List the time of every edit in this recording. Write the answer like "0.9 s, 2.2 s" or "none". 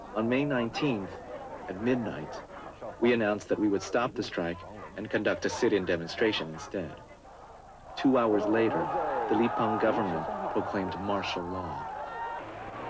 4.1 s